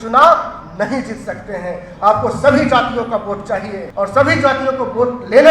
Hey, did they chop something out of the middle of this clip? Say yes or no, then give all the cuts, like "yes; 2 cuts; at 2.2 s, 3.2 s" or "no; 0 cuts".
yes; 1 cut; at 3.8 s